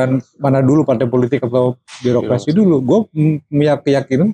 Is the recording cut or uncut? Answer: uncut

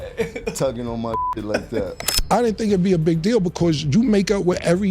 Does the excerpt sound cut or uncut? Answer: cut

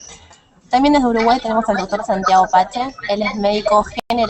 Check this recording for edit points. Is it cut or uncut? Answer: cut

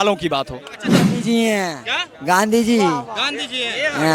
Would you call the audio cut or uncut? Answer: cut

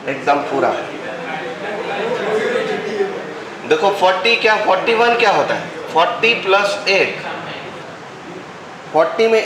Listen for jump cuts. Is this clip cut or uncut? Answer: cut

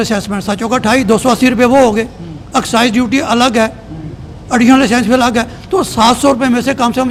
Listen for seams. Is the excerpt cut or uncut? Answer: uncut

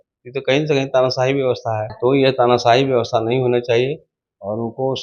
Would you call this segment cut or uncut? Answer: cut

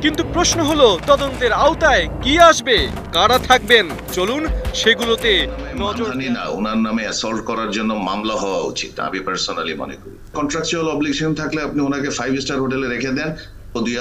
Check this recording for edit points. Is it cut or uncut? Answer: cut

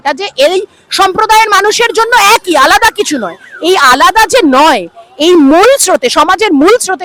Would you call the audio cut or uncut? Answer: uncut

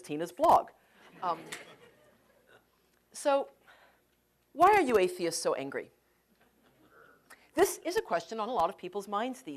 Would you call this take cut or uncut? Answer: uncut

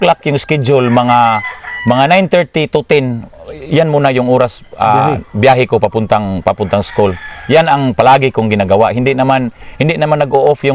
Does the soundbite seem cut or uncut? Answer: uncut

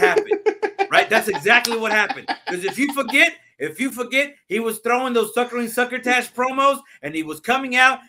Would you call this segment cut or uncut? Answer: uncut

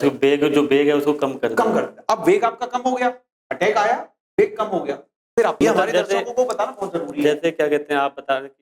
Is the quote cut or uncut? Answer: cut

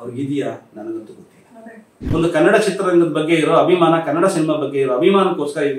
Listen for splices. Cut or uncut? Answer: cut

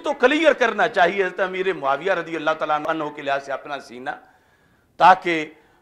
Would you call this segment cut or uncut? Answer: uncut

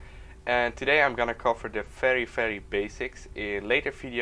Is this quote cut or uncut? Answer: uncut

